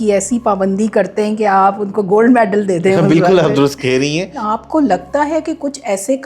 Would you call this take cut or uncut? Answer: cut